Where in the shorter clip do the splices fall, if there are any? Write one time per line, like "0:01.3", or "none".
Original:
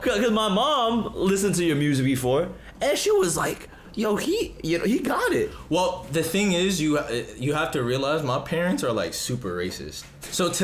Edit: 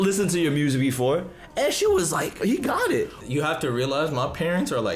0:02.4
0:03.2